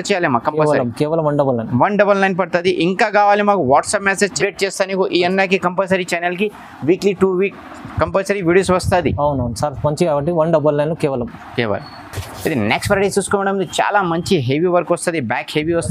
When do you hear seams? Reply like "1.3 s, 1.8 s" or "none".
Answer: none